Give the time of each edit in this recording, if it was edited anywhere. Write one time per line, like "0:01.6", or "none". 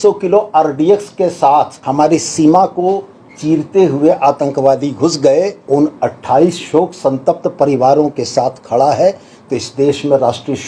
0:05.6